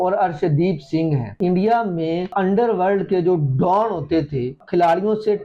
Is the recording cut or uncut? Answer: cut